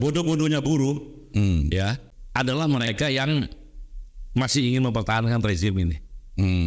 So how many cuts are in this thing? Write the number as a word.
zero